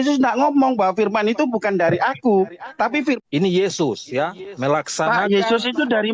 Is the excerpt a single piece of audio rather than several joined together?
no; 1 cut; at 3.2 s

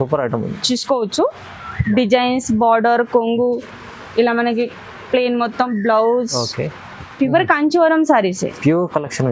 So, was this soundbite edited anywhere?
yes; 1 cut; at 7.1 s

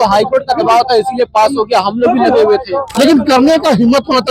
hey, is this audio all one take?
no; 1 cut; at 2.9 s

